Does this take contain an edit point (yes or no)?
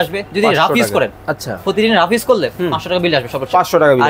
no